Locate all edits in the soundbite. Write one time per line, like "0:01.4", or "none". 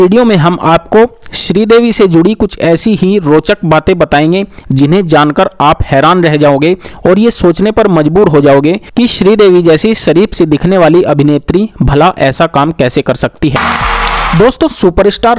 0:13.6